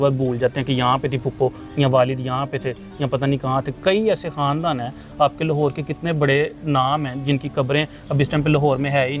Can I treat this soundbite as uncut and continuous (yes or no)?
yes